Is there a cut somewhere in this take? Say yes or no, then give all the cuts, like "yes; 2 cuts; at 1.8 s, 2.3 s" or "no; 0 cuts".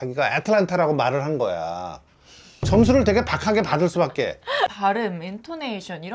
yes; 1 cut; at 4.7 s